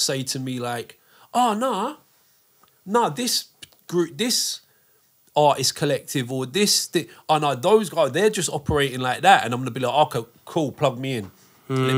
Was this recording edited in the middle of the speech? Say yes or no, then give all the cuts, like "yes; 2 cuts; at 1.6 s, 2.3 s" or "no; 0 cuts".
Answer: no; 0 cuts